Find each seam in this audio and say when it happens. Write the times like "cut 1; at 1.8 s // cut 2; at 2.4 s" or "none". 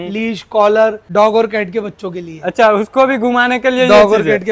cut 1; at 1.0 s